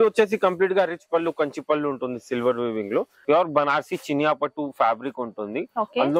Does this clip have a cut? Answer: yes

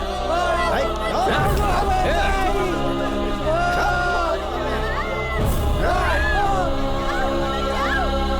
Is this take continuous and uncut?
yes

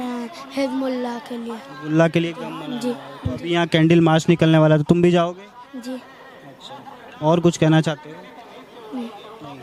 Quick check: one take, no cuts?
yes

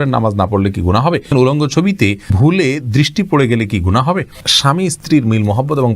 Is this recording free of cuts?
no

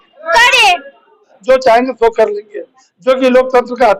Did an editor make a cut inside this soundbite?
yes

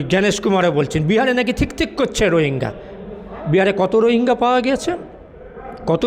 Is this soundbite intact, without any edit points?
yes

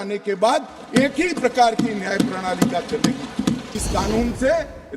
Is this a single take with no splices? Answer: no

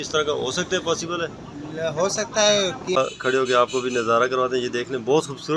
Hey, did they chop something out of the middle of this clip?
yes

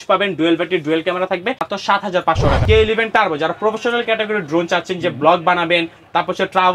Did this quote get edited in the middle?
yes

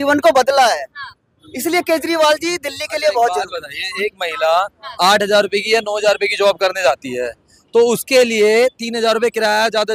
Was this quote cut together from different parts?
no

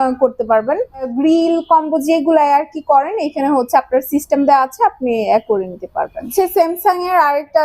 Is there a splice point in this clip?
yes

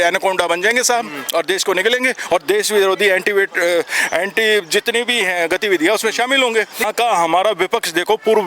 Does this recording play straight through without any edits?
no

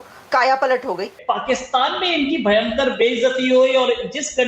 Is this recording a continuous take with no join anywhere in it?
no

